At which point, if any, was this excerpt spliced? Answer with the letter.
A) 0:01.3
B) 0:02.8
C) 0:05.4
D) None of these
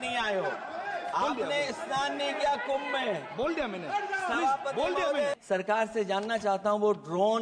C